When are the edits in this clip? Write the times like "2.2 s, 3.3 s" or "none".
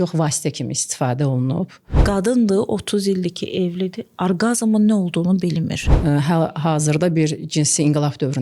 1.9 s, 5.8 s